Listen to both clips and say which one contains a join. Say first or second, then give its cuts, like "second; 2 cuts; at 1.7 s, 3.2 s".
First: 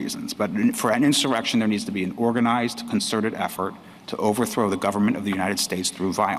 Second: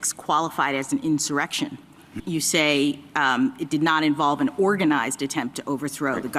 second; 1 cut; at 2.1 s